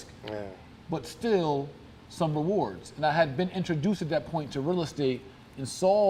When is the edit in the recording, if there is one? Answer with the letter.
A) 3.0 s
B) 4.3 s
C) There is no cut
C